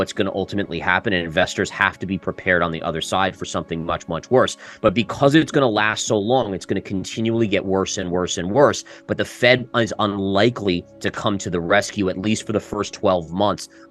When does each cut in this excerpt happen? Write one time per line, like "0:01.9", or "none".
none